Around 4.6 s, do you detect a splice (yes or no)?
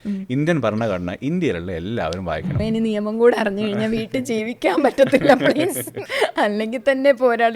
no